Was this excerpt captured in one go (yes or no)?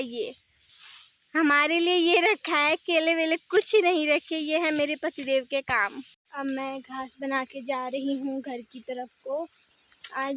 yes